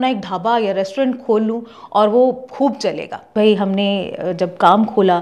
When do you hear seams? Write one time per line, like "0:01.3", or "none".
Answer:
0:03.3